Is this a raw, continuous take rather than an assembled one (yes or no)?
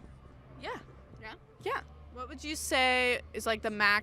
yes